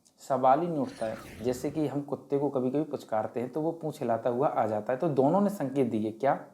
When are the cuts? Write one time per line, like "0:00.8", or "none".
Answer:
0:01.3